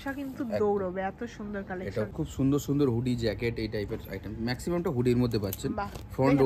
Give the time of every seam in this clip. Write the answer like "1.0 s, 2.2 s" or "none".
2.2 s